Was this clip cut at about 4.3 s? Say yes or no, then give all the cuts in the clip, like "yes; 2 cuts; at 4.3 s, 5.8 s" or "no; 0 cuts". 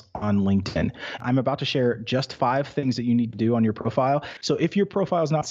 yes; 2 cuts; at 1.2 s, 4.3 s